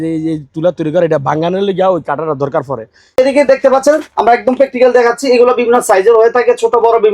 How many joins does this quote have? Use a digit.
1